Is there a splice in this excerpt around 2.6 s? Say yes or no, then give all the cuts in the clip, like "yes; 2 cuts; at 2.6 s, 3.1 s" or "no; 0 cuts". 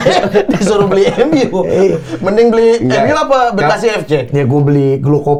no; 0 cuts